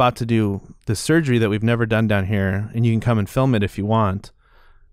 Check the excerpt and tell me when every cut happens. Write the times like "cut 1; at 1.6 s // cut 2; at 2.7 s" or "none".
none